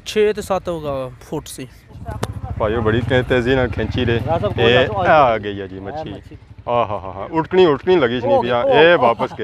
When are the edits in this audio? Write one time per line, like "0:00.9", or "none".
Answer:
0:01.9